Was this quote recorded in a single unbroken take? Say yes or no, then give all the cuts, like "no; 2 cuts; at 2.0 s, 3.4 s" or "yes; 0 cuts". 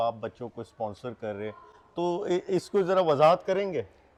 yes; 0 cuts